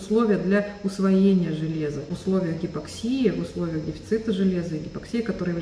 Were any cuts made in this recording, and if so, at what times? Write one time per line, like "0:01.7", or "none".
0:02.1

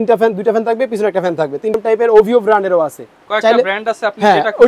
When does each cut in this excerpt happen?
0:01.7

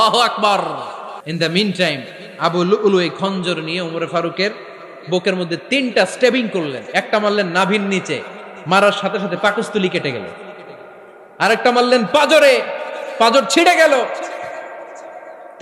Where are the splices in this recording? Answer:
0:01.2

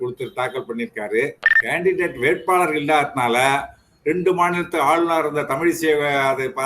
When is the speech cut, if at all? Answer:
0:01.5

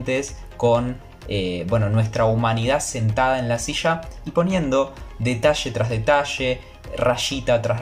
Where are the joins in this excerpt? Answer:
none

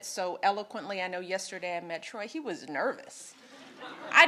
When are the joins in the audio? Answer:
none

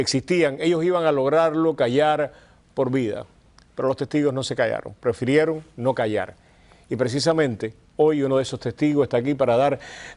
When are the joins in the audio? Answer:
0:00.9

